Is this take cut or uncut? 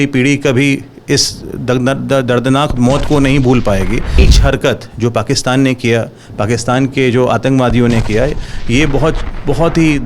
cut